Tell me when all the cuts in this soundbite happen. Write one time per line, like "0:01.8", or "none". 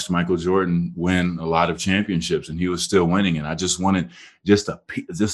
none